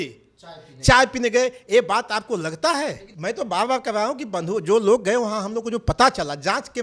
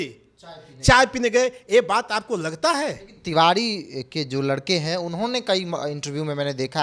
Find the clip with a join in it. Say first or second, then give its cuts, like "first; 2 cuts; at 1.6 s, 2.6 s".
first; 1 cut; at 3.1 s